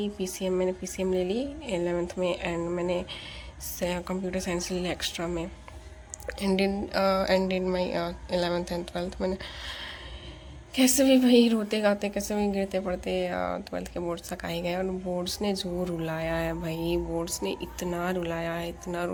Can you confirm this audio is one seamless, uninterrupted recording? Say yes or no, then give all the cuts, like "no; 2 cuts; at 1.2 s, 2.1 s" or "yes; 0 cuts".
yes; 0 cuts